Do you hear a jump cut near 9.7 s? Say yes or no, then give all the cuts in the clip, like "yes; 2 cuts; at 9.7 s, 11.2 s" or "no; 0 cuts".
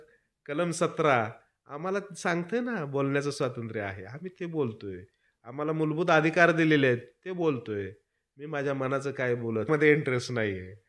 yes; 1 cut; at 9.7 s